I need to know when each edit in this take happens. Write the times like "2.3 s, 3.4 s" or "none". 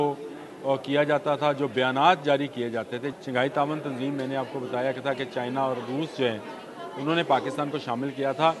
3.2 s